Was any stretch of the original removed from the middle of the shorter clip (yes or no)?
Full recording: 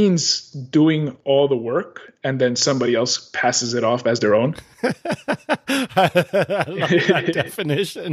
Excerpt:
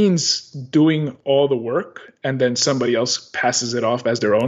no